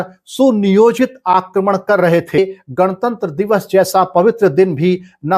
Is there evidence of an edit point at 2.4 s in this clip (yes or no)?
yes